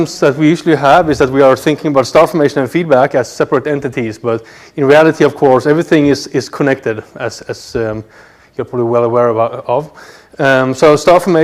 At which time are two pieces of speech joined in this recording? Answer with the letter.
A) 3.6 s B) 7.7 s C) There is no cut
A